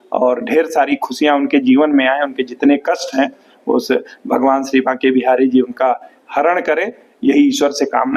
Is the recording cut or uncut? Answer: uncut